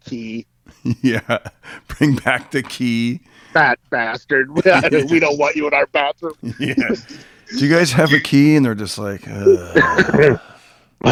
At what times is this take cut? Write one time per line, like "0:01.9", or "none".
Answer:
none